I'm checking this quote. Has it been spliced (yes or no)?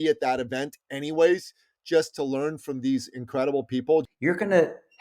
yes